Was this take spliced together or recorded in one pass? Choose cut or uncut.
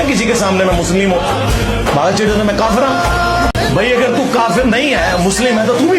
cut